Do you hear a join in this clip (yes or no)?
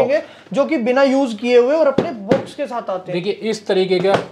no